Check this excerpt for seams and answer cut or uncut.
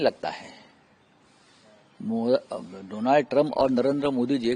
uncut